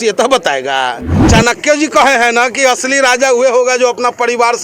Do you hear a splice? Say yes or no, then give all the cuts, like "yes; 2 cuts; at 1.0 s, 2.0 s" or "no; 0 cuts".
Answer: yes; 1 cut; at 1.1 s